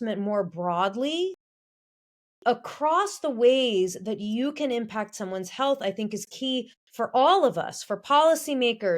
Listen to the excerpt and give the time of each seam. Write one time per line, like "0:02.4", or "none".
0:06.8